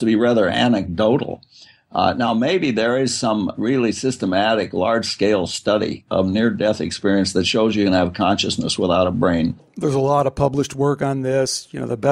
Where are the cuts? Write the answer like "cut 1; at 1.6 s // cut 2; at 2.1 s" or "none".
cut 1; at 9.7 s